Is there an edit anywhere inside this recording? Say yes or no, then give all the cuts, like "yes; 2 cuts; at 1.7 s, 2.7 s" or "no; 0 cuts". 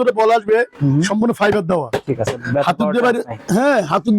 no; 0 cuts